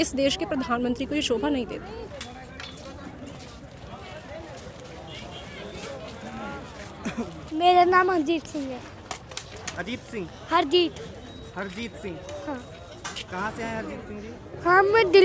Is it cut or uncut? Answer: uncut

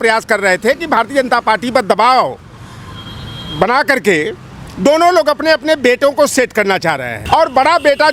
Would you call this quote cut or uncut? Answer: cut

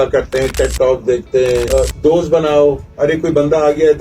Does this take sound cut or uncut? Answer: cut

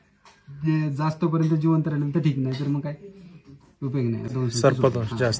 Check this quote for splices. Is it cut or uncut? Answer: cut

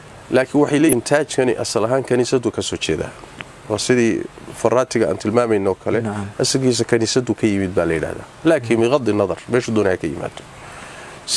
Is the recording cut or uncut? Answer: cut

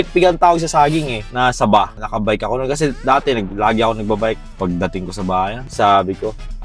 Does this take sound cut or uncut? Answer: cut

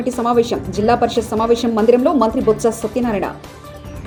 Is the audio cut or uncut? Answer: uncut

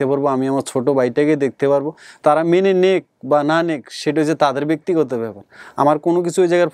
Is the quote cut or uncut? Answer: uncut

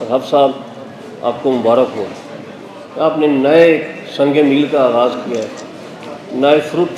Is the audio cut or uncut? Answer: uncut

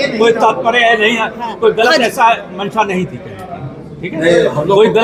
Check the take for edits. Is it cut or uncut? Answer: uncut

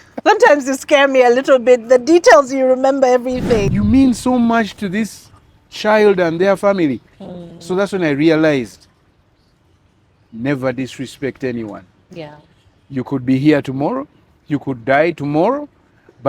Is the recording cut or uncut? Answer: cut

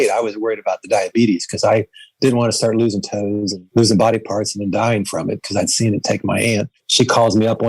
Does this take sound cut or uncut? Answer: cut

